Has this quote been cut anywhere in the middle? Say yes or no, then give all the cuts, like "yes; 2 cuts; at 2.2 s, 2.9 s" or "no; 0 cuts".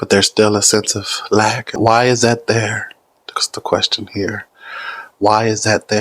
yes; 1 cut; at 1.7 s